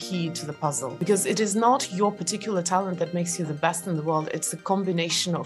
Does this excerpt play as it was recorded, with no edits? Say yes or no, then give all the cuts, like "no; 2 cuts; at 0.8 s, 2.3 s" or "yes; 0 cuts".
no; 1 cut; at 1.0 s